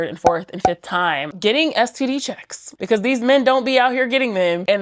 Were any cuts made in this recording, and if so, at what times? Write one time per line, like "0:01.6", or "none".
0:01.3